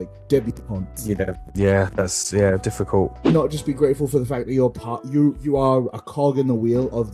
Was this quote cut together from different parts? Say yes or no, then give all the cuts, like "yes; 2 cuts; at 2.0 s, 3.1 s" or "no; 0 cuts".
yes; 1 cut; at 3.2 s